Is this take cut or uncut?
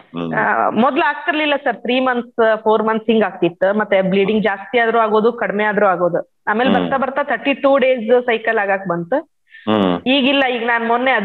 uncut